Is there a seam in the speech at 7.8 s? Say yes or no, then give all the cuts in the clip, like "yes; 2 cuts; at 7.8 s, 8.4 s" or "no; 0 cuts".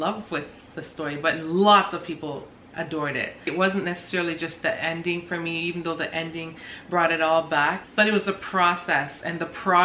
yes; 1 cut; at 7.8 s